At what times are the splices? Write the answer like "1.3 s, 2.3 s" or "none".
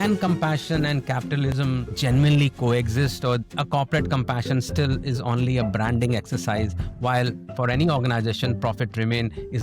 1.5 s

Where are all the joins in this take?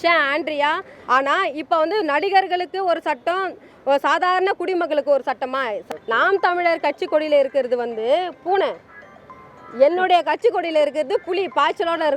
0.9 s, 5.8 s

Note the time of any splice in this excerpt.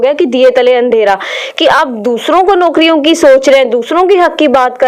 none

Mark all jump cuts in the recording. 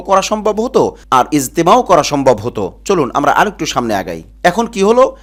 none

